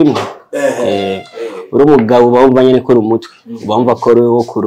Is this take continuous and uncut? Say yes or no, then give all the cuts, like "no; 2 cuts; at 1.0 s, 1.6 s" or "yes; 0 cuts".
yes; 0 cuts